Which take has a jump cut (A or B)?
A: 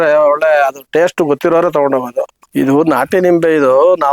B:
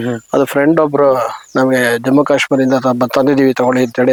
A